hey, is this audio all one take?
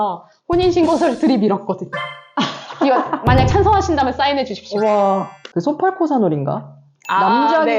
no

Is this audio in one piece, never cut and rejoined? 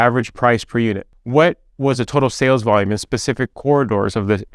no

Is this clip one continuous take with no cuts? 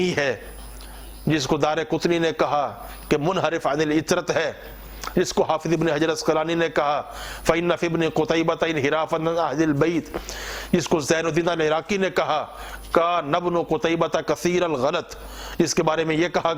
yes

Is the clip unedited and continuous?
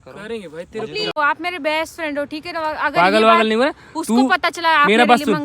no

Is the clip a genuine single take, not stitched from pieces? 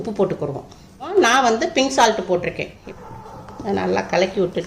yes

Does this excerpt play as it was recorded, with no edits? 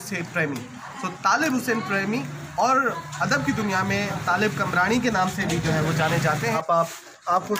no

